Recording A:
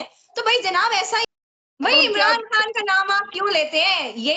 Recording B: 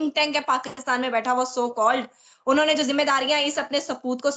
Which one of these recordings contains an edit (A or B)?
A